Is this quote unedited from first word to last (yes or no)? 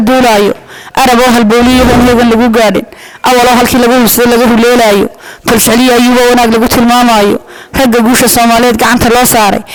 yes